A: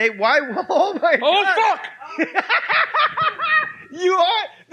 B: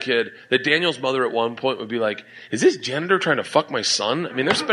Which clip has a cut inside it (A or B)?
A